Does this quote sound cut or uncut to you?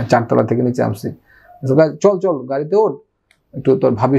uncut